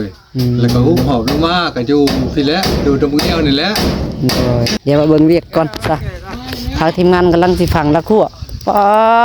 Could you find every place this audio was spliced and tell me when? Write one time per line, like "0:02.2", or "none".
0:04.7